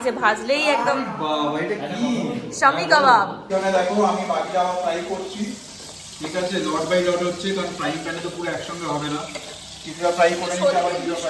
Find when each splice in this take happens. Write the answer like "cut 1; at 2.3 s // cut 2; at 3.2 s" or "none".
cut 1; at 3.5 s

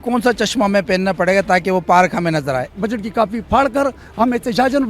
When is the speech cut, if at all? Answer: cut 1; at 2.7 s

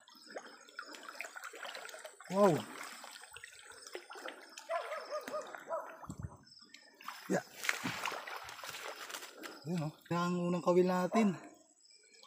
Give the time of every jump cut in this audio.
cut 1; at 10.1 s

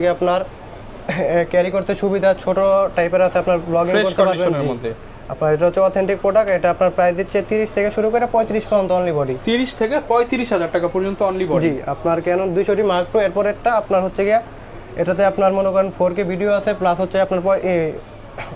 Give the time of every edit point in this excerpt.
none

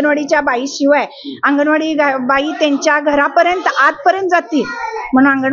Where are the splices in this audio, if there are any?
none

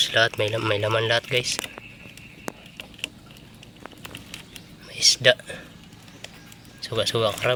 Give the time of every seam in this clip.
none

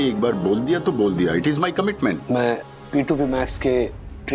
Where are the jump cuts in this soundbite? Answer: cut 1; at 2.2 s

